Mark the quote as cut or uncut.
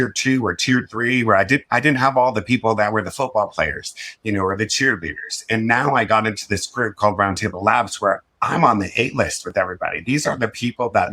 uncut